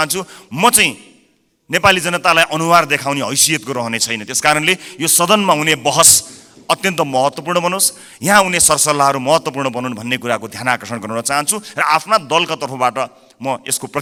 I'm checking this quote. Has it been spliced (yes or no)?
no